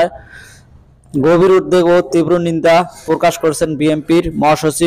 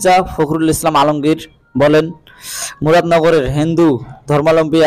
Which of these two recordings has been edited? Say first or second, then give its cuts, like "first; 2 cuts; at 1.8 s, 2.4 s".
first; 1 cut; at 3.6 s